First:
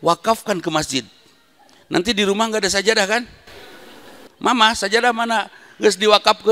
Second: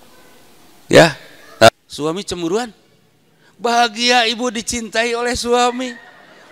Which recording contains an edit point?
second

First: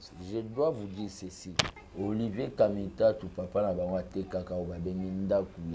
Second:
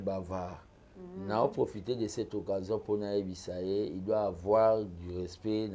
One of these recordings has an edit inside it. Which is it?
first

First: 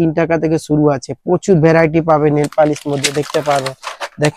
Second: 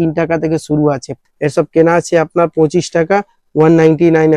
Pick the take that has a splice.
second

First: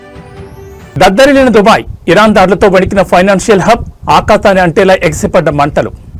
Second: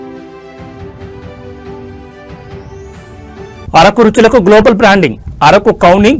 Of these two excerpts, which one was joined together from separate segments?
second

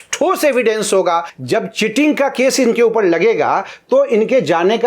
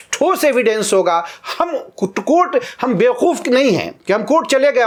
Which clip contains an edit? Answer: first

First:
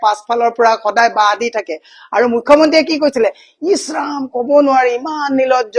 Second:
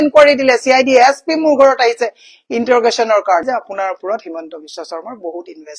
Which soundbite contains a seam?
second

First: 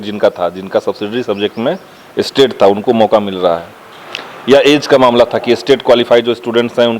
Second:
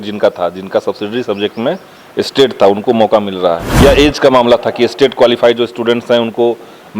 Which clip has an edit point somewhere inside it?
second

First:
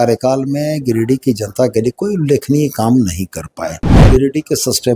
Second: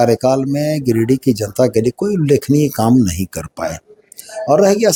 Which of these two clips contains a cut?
first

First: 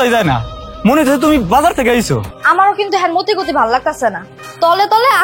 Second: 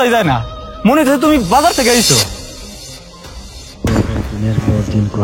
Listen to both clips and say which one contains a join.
first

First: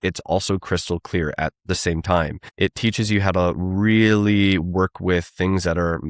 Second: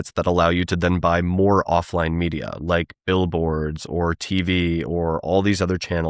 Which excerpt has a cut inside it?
first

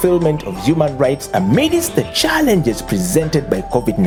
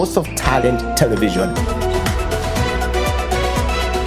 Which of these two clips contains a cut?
second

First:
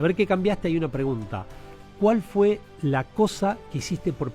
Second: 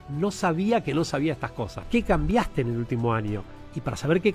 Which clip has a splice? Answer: second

